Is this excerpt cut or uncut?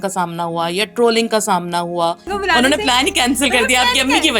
cut